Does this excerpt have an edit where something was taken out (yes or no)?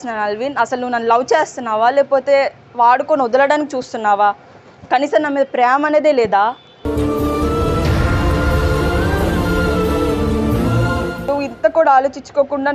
yes